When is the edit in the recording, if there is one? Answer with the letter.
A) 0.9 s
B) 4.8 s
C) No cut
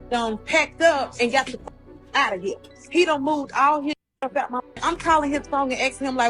B